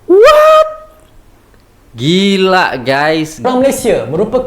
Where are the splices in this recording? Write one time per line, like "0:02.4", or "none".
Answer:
0:03.4